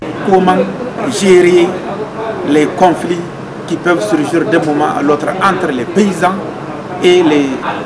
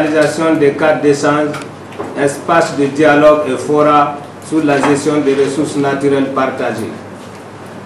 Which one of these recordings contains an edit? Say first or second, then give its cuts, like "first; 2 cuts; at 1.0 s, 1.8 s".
first; 1 cut; at 1.0 s